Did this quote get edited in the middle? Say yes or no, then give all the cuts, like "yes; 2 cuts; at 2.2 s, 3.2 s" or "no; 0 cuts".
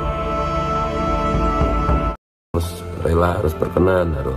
yes; 1 cut; at 2.5 s